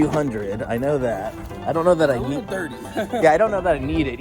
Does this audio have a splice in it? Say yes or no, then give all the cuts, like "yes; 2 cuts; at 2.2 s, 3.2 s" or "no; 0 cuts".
yes; 1 cut; at 1.4 s